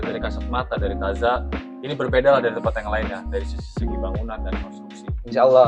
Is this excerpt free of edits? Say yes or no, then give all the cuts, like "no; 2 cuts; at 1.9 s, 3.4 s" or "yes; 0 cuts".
yes; 0 cuts